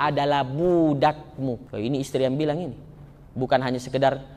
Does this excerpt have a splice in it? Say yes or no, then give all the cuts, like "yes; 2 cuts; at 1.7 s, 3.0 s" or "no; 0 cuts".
yes; 1 cut; at 1.7 s